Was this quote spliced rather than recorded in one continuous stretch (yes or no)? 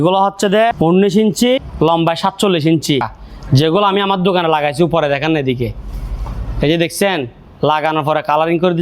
yes